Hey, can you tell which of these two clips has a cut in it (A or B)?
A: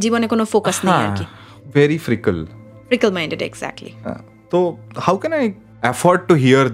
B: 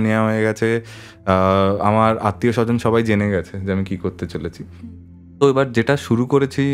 A